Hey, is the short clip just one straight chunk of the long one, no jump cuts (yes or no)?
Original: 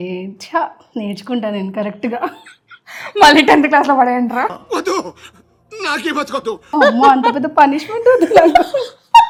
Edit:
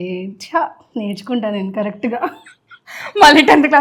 yes